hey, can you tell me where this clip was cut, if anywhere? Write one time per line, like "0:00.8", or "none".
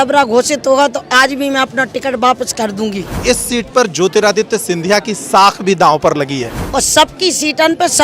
0:03.2
0:06.6